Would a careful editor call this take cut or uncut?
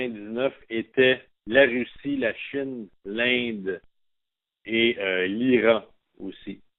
uncut